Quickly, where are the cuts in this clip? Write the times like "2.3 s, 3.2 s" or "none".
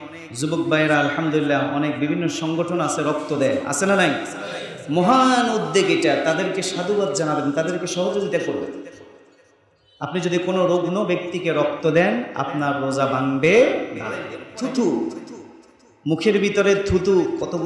14.4 s